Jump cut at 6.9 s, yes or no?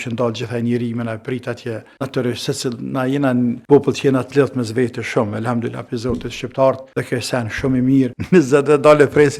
no